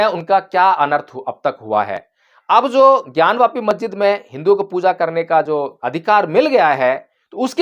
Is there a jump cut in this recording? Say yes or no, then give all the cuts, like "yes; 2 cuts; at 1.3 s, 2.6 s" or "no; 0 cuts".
yes; 1 cut; at 5.8 s